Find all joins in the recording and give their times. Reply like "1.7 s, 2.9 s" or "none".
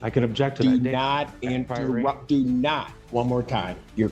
3.0 s

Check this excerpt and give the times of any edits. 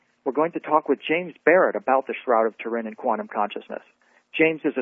3.4 s

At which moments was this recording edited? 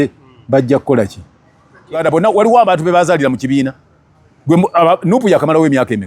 2.0 s

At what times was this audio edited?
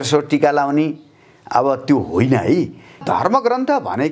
3.0 s

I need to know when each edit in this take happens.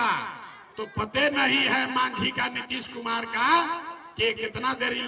none

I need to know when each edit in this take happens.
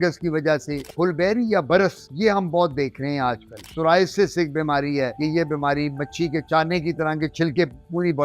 0.9 s, 3.6 s, 5.1 s

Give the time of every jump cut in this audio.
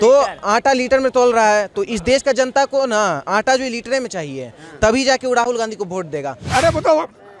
6.4 s

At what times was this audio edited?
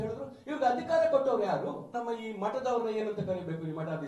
1.9 s

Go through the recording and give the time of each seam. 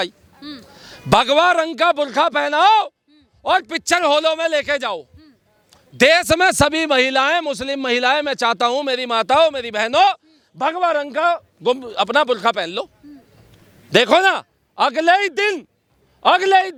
none

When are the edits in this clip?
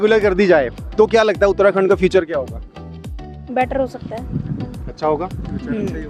none

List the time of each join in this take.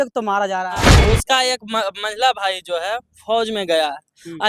1.0 s

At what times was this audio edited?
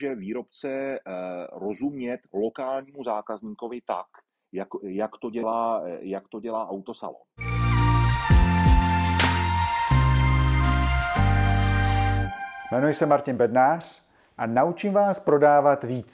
7.3 s

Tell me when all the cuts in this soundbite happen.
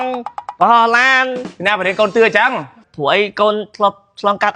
1.5 s

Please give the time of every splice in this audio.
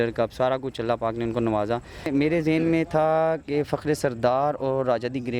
2.1 s

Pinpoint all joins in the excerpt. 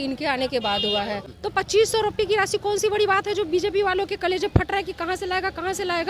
1.3 s

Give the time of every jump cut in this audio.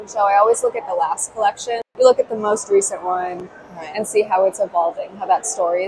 1.9 s

